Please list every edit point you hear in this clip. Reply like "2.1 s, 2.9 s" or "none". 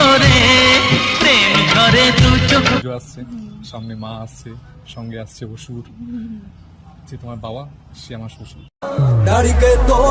2.8 s